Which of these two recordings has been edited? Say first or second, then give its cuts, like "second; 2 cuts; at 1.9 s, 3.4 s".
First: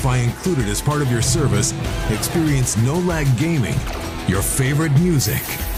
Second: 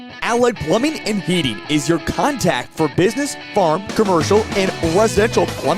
second; 1 cut; at 1.0 s